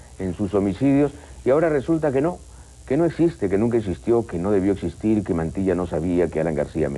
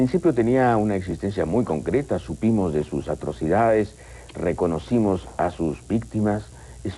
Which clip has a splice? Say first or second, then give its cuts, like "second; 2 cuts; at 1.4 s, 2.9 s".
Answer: first; 1 cut; at 1.3 s